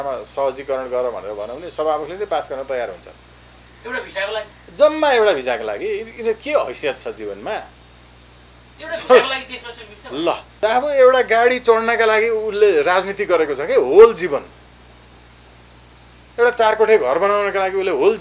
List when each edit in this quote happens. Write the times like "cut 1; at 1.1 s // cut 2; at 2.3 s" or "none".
cut 1; at 10.5 s